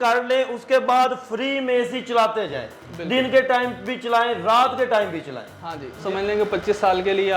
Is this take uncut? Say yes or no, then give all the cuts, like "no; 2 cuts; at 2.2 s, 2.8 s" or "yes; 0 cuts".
no; 1 cut; at 6.0 s